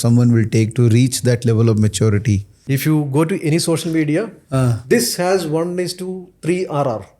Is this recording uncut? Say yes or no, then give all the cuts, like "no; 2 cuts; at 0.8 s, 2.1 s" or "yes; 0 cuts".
no; 1 cut; at 2.8 s